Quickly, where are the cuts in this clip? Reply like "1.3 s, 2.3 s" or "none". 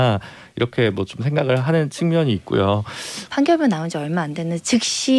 3.3 s